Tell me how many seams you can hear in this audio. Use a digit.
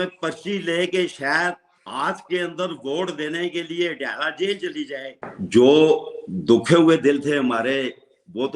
1